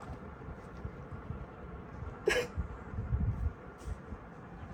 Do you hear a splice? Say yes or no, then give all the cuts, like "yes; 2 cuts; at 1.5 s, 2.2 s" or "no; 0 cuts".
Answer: no; 0 cuts